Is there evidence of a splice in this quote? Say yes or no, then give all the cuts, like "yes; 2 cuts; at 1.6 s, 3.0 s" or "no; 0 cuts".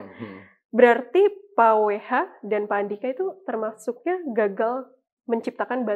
no; 0 cuts